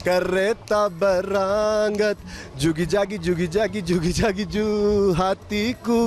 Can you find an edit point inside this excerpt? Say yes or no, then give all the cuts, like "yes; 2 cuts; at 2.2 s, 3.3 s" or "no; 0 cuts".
no; 0 cuts